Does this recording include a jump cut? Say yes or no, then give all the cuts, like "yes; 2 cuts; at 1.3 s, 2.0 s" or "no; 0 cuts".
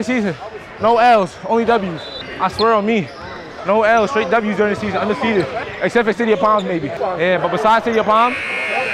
yes; 3 cuts; at 2.1 s, 5.6 s, 6.9 s